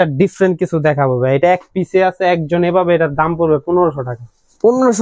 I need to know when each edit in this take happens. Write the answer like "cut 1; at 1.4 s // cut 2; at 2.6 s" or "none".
none